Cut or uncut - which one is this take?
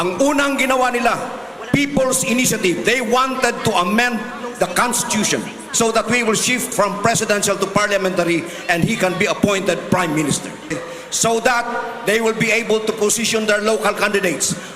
cut